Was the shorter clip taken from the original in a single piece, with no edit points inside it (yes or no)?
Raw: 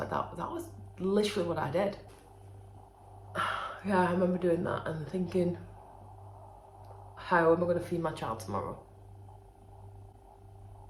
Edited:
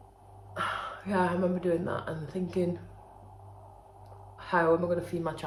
yes